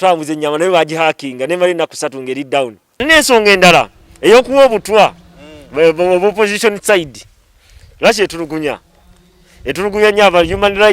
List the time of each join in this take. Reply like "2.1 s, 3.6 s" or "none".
3.0 s